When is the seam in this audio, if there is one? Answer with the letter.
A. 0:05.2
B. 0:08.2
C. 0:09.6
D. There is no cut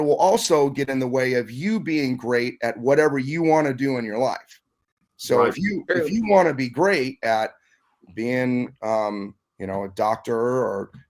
D